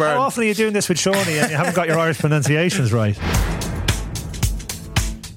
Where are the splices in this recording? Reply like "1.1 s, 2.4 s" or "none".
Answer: 3.2 s